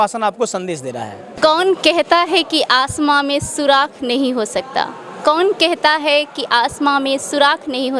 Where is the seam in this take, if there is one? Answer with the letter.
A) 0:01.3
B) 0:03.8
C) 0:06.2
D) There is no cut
A